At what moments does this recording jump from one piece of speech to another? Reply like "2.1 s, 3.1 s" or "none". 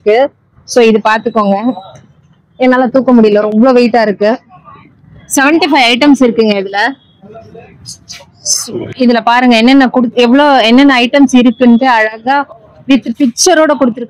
none